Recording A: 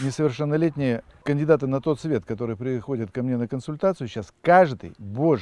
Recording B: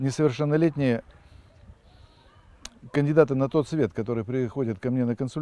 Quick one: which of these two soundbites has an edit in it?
A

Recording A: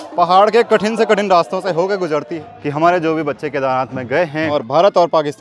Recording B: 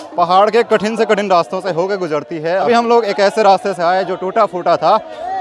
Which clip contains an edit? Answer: A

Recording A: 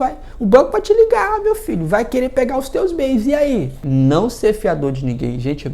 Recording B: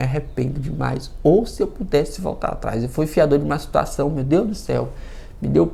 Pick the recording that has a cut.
A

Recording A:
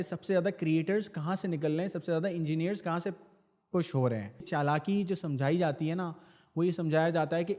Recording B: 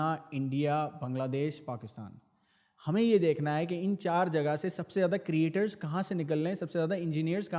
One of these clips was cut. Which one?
A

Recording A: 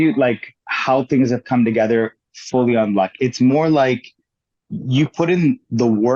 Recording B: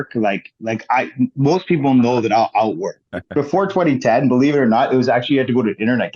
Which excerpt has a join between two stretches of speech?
B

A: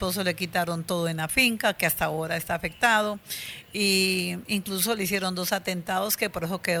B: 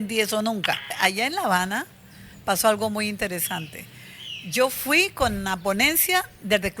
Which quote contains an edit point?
B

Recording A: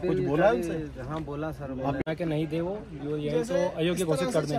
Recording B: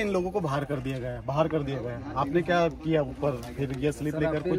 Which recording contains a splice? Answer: A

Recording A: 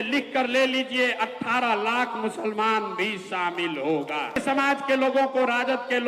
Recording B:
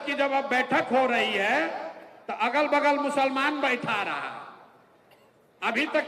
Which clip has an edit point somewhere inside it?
A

